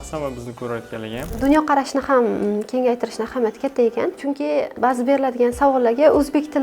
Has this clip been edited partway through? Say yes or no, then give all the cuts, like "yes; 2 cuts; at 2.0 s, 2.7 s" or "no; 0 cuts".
yes; 2 cuts; at 1.4 s, 4.7 s